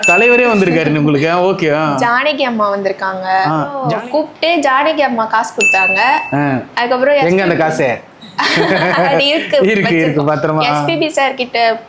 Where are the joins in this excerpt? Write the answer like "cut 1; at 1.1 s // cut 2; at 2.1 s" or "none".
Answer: cut 1; at 3.8 s